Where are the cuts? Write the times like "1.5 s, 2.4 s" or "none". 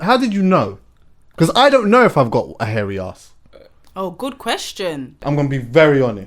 5.2 s

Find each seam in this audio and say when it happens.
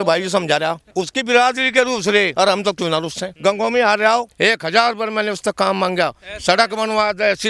0.8 s, 2.3 s, 3.3 s, 4.3 s

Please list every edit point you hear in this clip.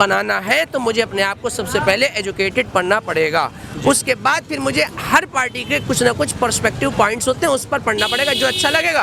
none

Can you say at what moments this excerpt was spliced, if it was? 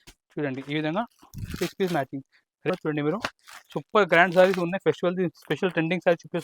2.7 s

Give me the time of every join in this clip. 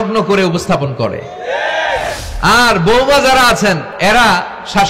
2.1 s, 3.9 s

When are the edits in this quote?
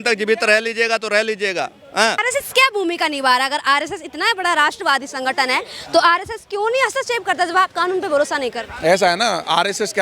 2.2 s

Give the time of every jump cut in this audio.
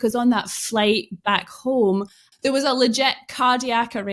2.2 s

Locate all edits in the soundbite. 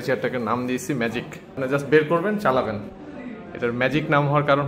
1.6 s, 2.9 s

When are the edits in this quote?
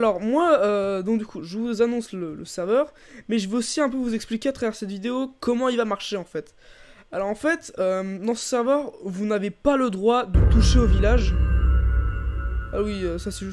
none

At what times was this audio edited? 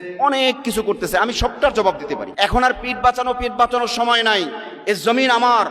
2.2 s

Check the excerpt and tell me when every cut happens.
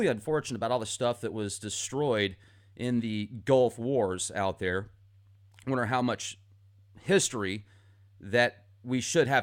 none

